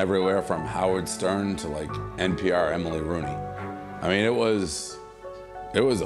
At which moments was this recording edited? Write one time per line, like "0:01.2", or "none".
none